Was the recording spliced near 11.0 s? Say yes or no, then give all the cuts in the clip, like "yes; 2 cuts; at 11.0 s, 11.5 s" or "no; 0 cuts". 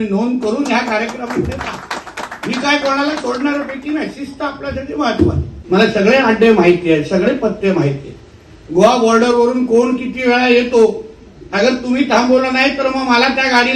no; 1 cut; at 5.5 s